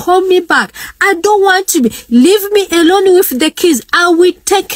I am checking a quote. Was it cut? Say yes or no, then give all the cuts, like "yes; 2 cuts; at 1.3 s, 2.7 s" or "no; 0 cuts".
no; 0 cuts